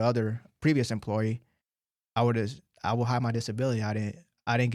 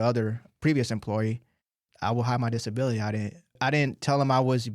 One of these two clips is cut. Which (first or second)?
second